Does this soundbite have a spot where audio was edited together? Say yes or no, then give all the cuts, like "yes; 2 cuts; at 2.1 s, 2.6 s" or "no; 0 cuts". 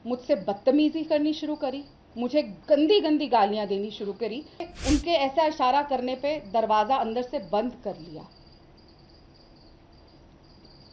yes; 1 cut; at 4.7 s